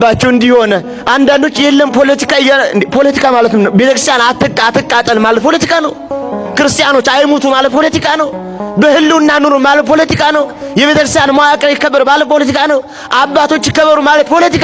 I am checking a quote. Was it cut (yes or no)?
no